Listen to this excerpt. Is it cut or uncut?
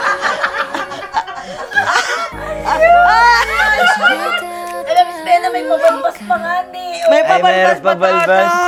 uncut